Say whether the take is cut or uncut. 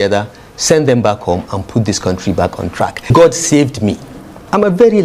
cut